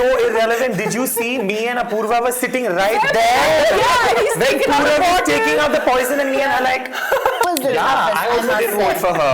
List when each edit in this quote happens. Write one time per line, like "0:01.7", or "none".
0:07.5